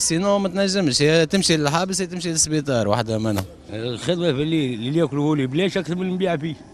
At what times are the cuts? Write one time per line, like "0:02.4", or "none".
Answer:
0:03.6